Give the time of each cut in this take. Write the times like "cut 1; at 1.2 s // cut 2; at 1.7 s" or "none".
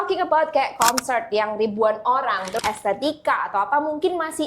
cut 1; at 2.5 s

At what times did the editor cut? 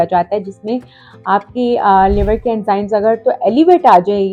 none

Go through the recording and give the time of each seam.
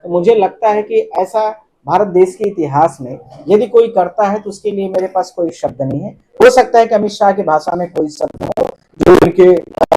none

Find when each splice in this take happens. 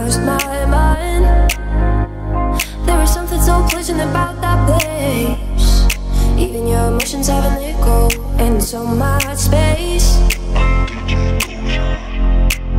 none

